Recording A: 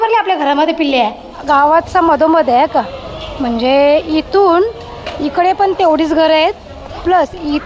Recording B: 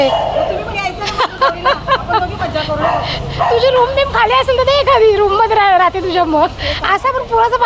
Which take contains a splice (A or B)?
A